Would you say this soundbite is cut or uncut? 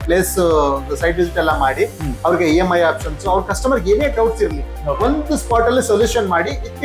uncut